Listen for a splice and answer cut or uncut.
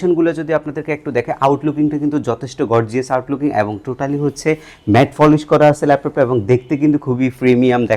uncut